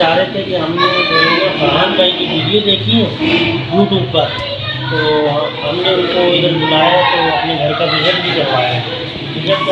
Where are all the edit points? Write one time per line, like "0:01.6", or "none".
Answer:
none